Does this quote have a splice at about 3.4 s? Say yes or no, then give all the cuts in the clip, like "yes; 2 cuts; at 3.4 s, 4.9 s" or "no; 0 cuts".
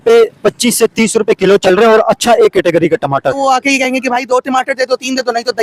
yes; 1 cut; at 3.4 s